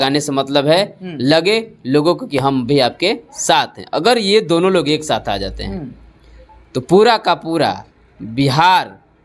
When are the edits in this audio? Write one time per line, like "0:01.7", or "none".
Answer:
none